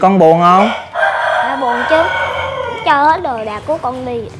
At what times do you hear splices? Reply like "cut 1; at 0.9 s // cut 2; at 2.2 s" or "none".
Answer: none